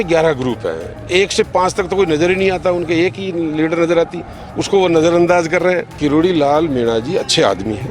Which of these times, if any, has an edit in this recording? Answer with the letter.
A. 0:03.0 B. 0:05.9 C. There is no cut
B